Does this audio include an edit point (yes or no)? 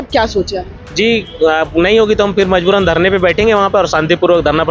no